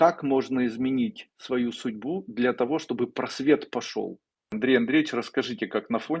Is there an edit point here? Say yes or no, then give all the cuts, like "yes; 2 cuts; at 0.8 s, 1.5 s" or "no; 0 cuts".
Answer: yes; 1 cut; at 4.3 s